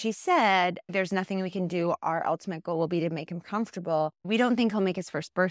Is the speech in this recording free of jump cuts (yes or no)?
no